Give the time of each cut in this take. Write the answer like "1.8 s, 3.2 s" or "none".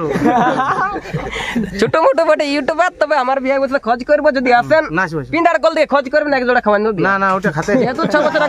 none